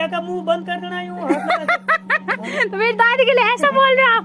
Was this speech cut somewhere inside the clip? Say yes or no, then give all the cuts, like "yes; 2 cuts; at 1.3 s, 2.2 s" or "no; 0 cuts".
no; 0 cuts